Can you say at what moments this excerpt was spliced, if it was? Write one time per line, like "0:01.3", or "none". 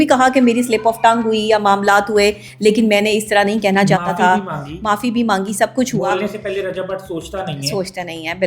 none